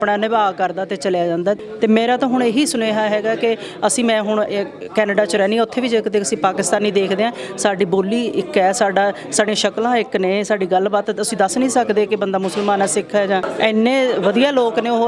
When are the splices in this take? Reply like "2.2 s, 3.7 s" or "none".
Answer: 1.6 s, 13.5 s